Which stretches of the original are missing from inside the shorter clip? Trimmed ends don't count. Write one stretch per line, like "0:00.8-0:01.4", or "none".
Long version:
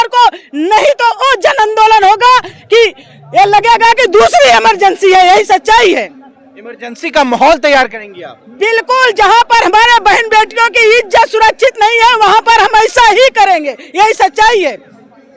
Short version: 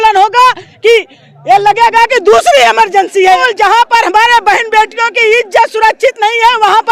0:05.3-0:09.0